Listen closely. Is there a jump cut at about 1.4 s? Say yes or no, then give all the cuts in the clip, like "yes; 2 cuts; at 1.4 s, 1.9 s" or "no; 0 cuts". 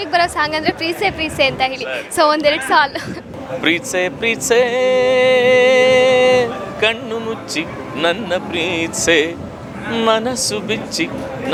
no; 0 cuts